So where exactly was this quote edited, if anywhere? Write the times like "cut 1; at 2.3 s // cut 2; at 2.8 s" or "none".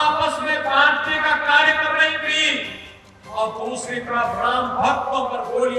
none

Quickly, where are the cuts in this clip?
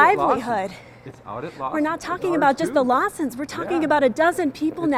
none

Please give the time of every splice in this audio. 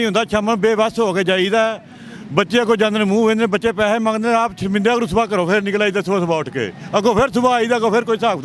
none

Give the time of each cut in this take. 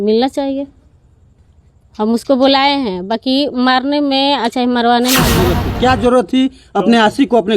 cut 1; at 5.5 s

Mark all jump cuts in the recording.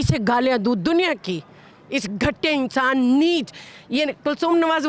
none

